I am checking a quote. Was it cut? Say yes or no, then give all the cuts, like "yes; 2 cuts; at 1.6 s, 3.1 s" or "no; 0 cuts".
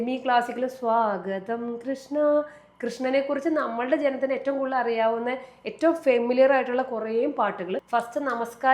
yes; 1 cut; at 7.8 s